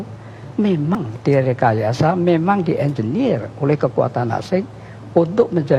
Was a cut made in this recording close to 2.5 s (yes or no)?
no